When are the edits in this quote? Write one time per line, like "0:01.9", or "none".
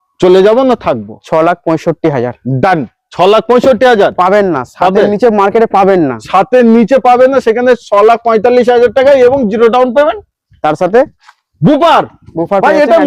none